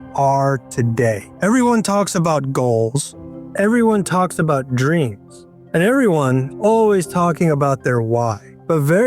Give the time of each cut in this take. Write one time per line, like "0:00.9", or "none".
0:01.3
0:06.5